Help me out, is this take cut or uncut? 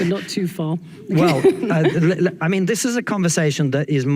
cut